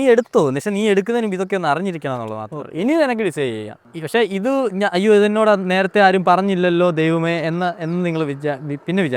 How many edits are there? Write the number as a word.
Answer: zero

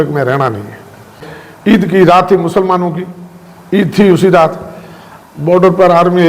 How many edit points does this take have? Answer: one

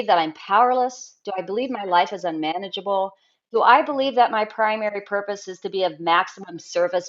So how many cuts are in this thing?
zero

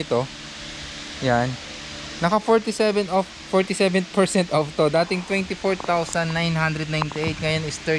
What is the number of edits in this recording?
zero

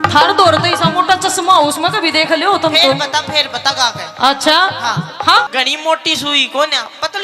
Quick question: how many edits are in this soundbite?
one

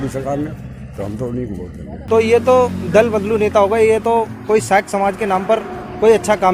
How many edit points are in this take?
one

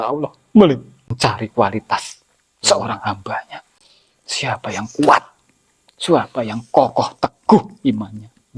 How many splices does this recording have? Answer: one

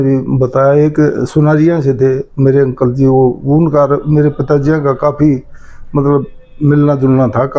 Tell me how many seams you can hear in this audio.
zero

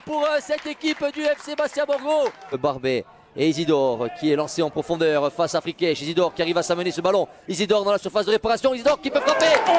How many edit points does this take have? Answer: one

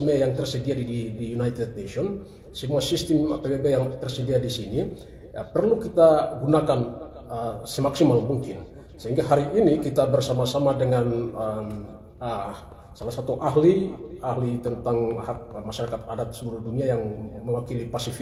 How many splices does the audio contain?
zero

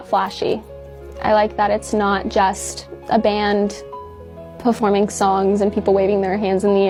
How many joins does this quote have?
zero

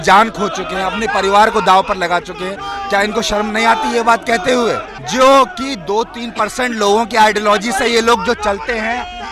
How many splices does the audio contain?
one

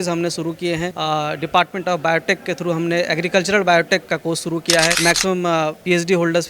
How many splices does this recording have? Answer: two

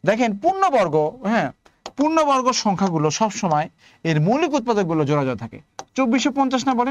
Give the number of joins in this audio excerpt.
zero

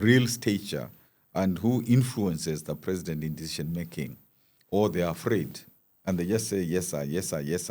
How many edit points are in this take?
zero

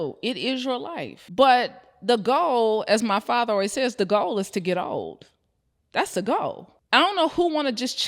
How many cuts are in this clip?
two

